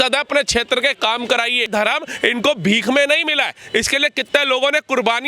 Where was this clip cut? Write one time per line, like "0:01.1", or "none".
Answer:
0:01.7